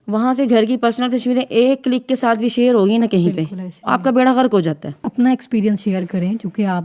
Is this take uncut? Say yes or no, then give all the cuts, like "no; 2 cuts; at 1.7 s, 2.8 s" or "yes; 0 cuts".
no; 1 cut; at 5.1 s